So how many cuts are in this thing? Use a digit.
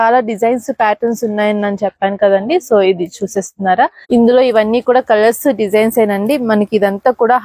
1